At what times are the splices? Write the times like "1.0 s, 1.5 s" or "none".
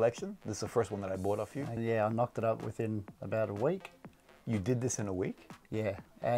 1.8 s